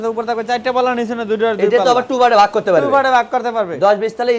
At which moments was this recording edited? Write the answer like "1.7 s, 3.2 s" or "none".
none